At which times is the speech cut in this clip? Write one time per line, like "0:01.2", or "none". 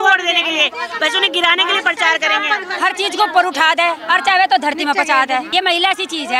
0:02.6
0:05.5